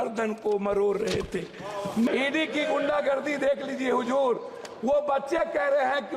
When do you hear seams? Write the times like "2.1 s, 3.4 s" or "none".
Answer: 2.1 s

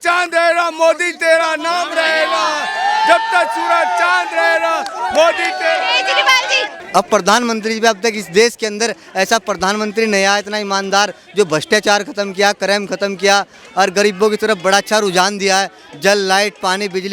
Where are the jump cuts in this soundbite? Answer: 6.7 s

